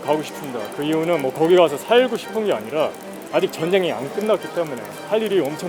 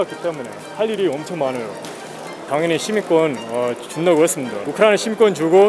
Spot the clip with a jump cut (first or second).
second